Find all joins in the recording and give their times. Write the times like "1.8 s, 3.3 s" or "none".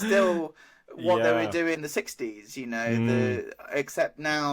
1.8 s